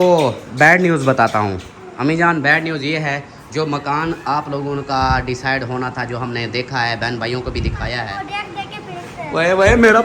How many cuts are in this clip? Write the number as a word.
one